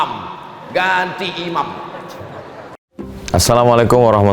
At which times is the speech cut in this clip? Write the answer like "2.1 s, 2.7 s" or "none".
2.8 s